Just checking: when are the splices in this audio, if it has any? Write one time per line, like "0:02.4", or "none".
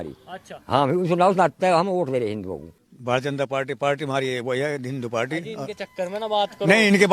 0:02.9